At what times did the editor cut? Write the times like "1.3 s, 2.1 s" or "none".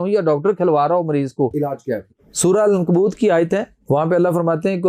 1.8 s